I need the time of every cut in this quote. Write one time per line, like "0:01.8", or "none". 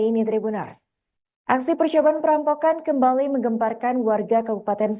0:03.8